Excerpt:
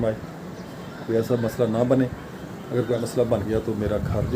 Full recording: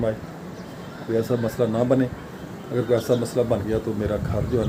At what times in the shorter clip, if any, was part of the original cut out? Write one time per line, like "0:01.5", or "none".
0:03.0